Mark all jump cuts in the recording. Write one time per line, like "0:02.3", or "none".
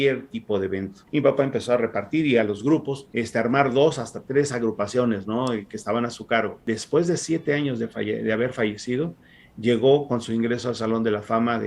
0:00.9
0:03.0
0:06.6